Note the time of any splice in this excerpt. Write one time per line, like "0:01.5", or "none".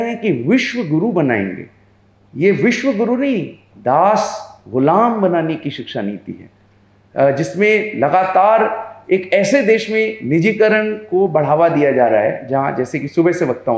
none